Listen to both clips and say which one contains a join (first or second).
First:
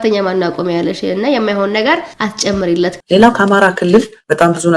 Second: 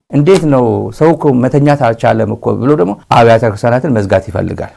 first